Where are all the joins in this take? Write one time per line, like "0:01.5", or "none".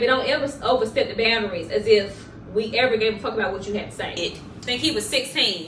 0:04.2